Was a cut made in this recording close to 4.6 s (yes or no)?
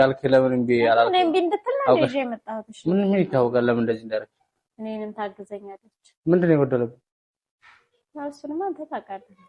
yes